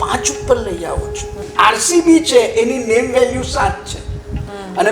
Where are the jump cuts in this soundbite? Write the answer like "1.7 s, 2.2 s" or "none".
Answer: 1.5 s